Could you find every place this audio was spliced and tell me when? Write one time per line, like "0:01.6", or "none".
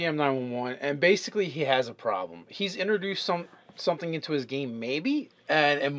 0:01.2